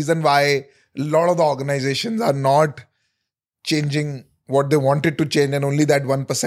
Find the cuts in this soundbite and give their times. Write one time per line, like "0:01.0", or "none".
none